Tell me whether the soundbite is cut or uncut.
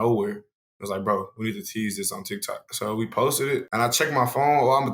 cut